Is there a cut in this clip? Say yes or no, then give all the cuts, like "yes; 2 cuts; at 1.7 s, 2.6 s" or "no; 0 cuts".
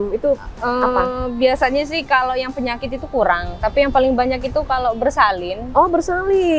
no; 0 cuts